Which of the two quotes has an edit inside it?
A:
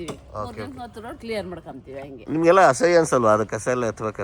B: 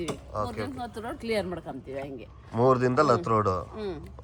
A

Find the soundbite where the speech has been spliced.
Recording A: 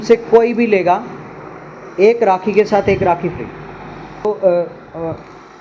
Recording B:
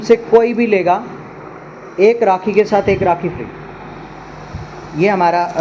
A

